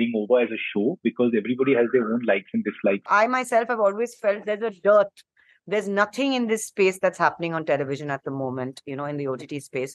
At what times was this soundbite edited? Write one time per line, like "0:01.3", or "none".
0:03.0